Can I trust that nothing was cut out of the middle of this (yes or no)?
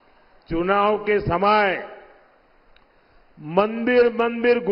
yes